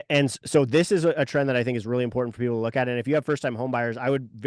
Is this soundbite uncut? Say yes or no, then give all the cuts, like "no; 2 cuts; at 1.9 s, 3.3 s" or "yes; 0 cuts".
yes; 0 cuts